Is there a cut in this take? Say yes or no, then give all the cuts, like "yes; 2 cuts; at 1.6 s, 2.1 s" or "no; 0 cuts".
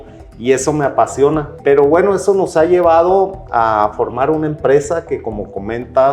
yes; 1 cut; at 1.5 s